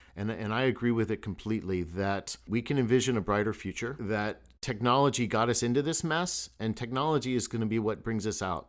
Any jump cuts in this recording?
yes; 2 cuts; at 2.5 s, 4.0 s

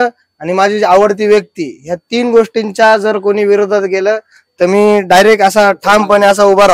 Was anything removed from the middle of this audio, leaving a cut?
no; 0 cuts

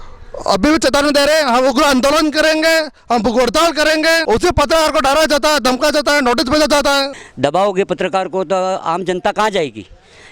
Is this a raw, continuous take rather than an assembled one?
no; 2 cuts; at 4.2 s, 7.2 s

